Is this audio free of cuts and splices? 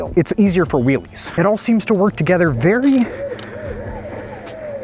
no; 1 cut; at 1.3 s

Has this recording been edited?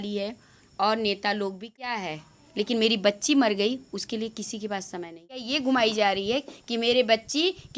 yes; 2 cuts; at 2.0 s, 5.5 s

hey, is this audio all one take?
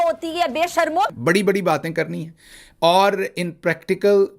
no; 1 cut; at 1.1 s

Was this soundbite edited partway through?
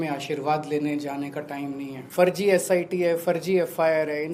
yes; 1 cut; at 2.0 s

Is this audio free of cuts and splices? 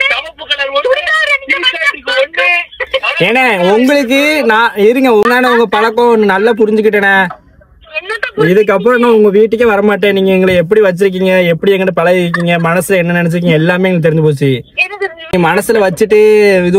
no; 2 cuts; at 5.2 s, 15.3 s

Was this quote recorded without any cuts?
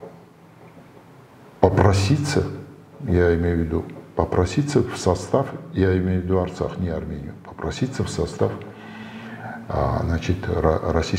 yes; 0 cuts

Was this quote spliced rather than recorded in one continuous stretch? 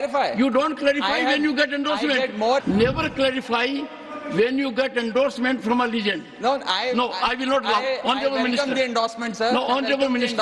yes; 1 cut; at 2.6 s

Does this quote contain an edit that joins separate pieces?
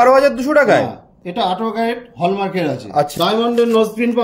yes; 1 cut; at 3.1 s

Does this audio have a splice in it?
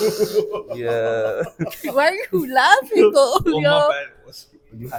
no; 0 cuts

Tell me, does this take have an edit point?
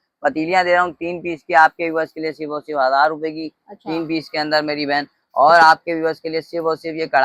no; 0 cuts

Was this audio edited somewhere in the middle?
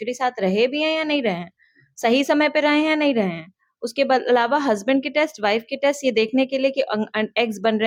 no; 0 cuts

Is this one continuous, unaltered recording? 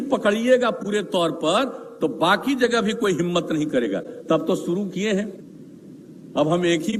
yes; 0 cuts

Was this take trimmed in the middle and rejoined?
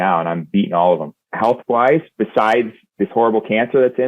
yes; 2 cuts; at 1.2 s, 2.8 s

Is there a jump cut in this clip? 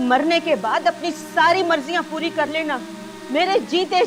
no; 0 cuts

